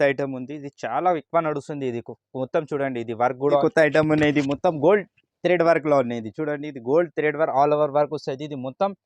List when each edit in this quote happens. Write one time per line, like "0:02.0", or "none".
0:03.6